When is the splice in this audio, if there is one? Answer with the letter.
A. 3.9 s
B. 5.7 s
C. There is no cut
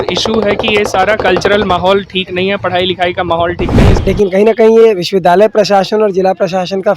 A